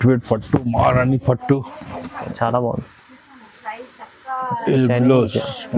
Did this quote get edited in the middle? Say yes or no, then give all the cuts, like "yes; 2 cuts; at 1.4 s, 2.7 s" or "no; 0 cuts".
yes; 1 cut; at 2.3 s